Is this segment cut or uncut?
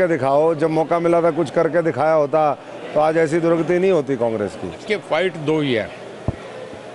cut